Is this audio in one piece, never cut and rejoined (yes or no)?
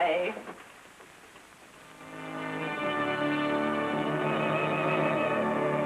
no